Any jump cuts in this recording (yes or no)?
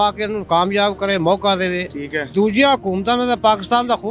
no